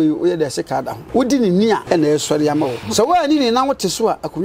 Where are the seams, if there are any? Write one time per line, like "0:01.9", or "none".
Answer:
0:01.0
0:01.8
0:02.8

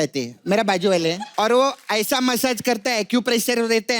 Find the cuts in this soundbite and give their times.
0:01.1

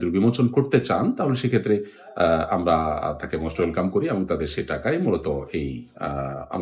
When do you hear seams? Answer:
none

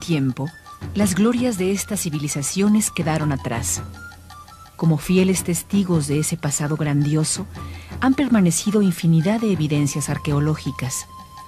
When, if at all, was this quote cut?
none

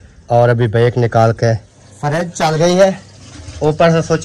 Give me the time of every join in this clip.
0:01.7

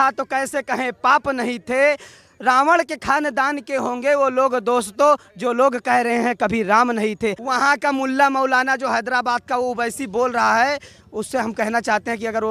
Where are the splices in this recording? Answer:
0:07.4

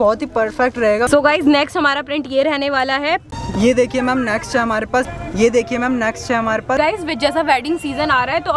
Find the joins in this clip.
0:01.1
0:03.3
0:05.1
0:06.8

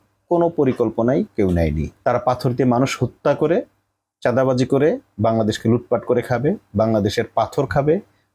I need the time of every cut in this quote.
0:01.9

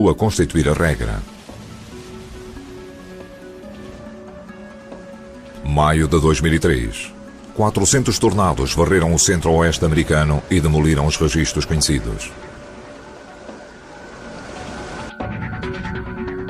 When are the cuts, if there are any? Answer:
none

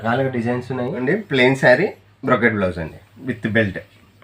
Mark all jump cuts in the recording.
0:01.0

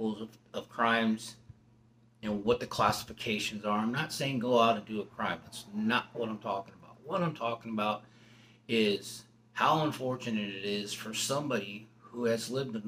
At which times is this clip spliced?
none

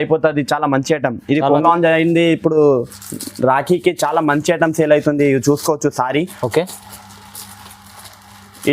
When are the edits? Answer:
0:01.6

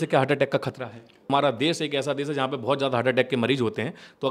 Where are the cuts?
0:01.3

